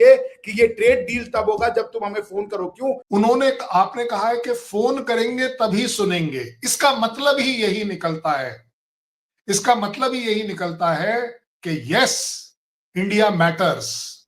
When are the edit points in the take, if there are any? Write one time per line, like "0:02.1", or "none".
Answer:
0:03.0